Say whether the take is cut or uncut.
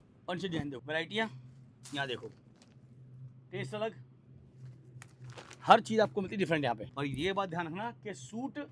cut